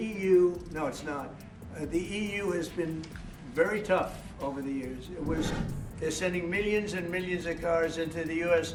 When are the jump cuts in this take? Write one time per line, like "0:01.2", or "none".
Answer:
none